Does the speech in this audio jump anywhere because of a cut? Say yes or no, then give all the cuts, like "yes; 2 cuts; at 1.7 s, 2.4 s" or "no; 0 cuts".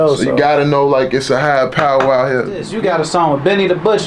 yes; 1 cut; at 2.7 s